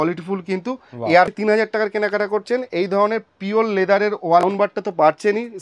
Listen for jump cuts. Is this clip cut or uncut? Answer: cut